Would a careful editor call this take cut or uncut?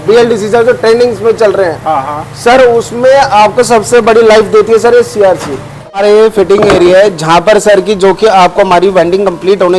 cut